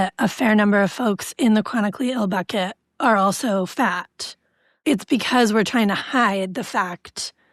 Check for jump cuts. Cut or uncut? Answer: uncut